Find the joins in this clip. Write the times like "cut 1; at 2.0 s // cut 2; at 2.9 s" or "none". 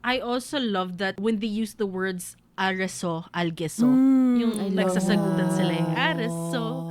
cut 1; at 1.2 s